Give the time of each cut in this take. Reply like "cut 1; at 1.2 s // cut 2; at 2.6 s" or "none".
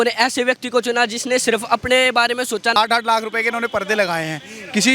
cut 1; at 2.8 s